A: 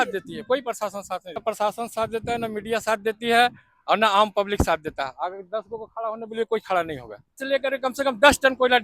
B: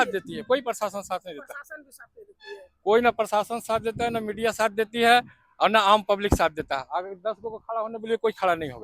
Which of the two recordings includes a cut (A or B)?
A